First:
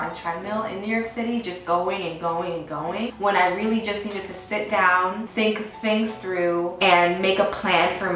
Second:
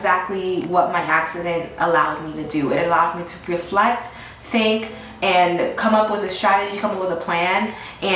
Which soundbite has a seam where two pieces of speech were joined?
first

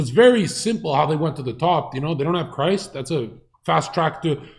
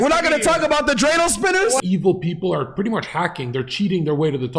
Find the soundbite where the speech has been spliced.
second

